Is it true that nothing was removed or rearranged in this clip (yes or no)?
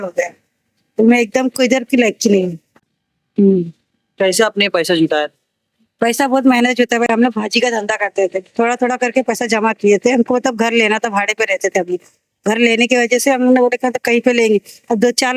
yes